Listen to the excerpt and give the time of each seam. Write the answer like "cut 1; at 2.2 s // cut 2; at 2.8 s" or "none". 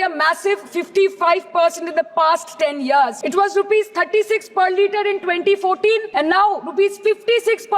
cut 1; at 3.2 s // cut 2; at 6.1 s